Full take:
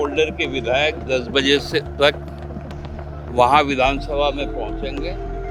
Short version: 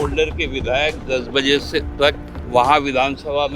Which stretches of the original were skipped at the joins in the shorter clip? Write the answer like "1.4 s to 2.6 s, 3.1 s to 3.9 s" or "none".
2.3 s to 3.1 s